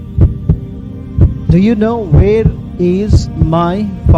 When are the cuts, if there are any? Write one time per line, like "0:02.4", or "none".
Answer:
0:01.0